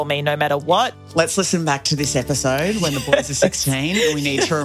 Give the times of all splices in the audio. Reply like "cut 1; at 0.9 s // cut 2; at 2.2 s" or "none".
cut 1; at 1.0 s